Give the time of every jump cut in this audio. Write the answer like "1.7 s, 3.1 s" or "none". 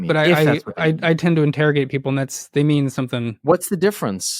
3.4 s